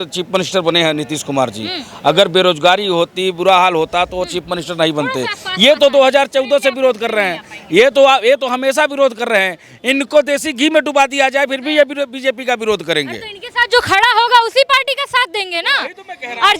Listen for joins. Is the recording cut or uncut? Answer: uncut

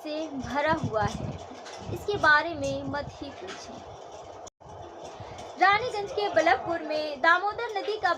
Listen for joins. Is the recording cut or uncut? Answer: cut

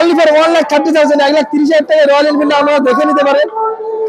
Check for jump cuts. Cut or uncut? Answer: uncut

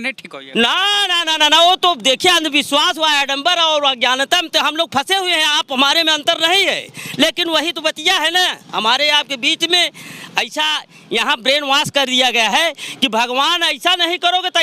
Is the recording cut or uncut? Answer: uncut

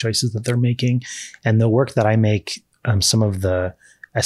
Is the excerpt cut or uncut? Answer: uncut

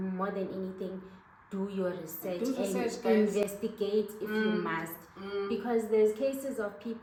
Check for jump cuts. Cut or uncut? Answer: uncut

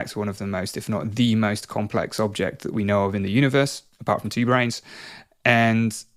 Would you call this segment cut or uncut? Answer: uncut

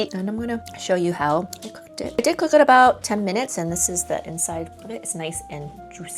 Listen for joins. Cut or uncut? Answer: uncut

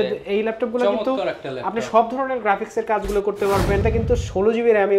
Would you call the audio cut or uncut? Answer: cut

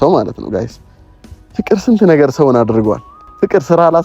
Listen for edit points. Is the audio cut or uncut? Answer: cut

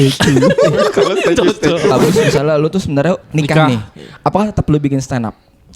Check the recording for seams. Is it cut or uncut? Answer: cut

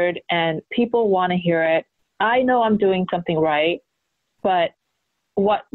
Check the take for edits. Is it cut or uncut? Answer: uncut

